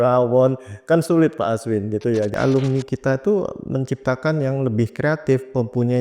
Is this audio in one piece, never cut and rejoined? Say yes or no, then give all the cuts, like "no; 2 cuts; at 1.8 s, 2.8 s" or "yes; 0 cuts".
no; 1 cut; at 2.3 s